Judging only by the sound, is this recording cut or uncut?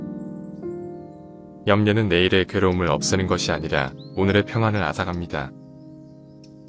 cut